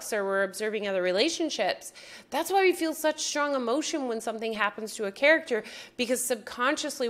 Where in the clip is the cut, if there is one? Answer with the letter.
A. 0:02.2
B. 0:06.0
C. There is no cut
C